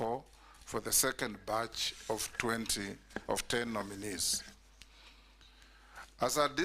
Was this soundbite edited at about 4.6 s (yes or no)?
no